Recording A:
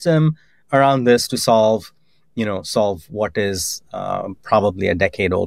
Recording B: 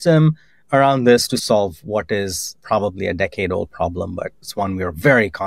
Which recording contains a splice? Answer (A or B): B